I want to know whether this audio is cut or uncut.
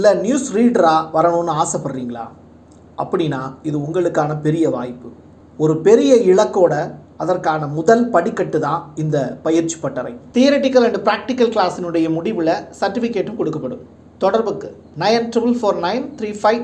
uncut